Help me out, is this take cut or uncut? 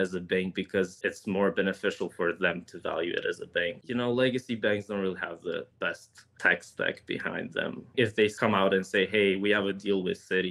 cut